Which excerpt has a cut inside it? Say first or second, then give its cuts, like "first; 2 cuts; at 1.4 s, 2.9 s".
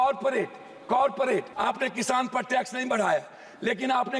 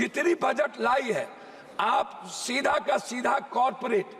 first; 1 cut; at 1.5 s